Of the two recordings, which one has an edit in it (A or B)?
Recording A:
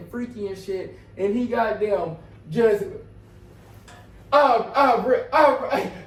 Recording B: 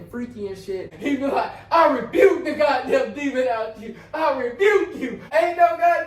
B